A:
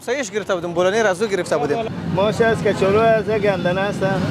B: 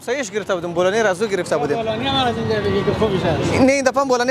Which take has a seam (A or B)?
A